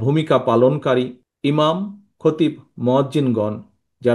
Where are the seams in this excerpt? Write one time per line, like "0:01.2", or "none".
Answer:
0:01.2